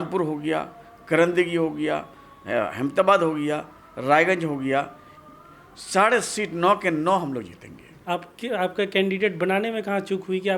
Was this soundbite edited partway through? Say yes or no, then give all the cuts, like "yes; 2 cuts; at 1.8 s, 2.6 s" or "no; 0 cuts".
yes; 1 cut; at 7.9 s